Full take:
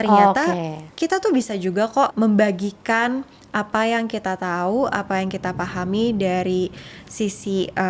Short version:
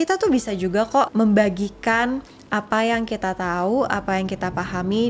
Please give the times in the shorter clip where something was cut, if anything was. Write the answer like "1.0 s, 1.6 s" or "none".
none

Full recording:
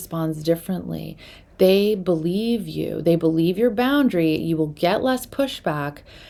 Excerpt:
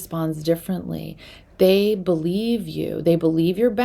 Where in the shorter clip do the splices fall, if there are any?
none

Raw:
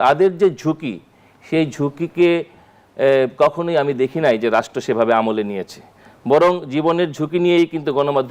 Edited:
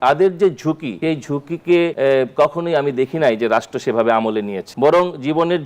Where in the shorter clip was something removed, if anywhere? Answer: 0.9 s, 1.9 s, 4.6 s

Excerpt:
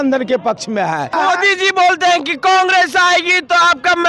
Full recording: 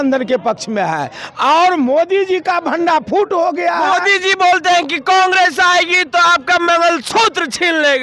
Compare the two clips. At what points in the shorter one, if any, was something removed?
1.1 s

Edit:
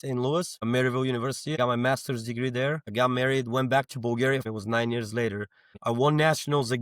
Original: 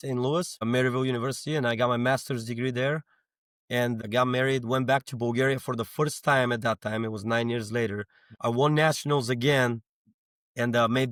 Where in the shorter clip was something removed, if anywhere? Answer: 1.6 s, 2.9 s, 4.5 s

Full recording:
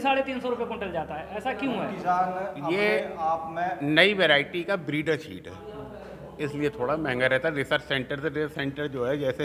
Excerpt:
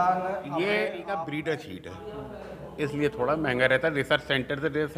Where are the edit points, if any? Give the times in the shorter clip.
1.1 s

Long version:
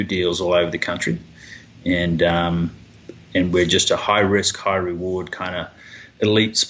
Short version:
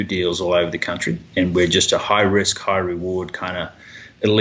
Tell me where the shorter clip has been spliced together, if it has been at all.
1.2 s

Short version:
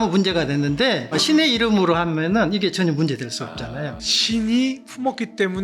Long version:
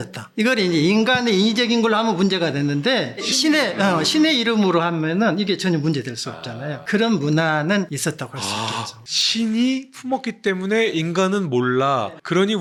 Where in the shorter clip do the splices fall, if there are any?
1.1 s, 3.9 s

